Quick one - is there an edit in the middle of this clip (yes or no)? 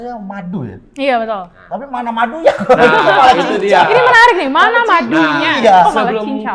no